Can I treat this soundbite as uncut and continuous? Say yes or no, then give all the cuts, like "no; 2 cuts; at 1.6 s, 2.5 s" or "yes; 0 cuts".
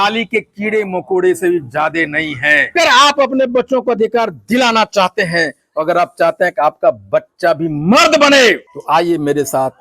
no; 2 cuts; at 2.7 s, 8.7 s